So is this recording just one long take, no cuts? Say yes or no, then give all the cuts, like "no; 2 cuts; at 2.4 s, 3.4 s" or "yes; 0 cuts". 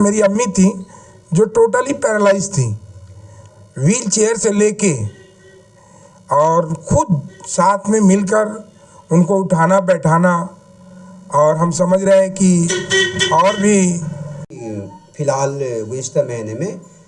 yes; 0 cuts